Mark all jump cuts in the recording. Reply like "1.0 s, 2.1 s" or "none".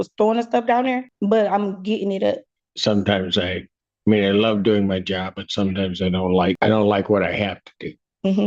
1.1 s, 2.6 s, 6.6 s